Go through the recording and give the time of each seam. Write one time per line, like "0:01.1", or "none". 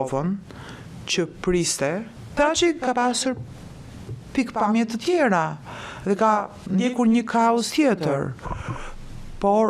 0:02.2